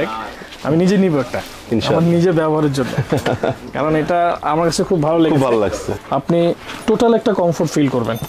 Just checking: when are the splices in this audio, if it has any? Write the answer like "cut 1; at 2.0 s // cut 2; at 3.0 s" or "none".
cut 1; at 5.9 s